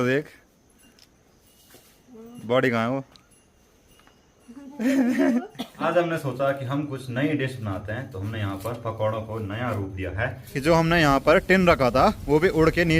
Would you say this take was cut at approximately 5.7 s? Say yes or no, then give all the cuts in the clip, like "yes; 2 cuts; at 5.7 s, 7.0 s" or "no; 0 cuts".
yes; 2 cuts; at 5.7 s, 10.5 s